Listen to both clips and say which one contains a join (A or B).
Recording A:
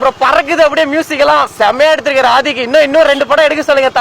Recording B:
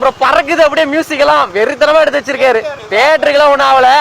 A